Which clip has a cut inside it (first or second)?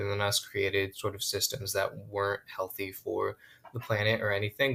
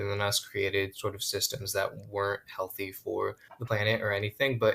second